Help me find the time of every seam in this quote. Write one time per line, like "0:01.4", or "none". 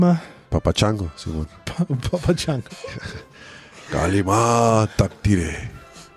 none